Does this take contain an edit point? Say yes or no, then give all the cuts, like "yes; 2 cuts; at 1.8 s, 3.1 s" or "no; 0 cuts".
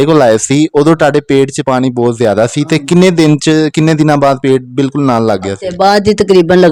no; 0 cuts